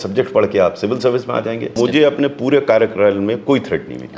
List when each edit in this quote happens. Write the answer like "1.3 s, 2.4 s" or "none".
1.7 s